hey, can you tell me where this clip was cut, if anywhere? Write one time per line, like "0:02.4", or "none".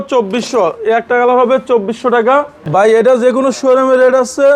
0:02.6